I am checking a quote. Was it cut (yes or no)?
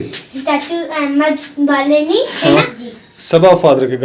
yes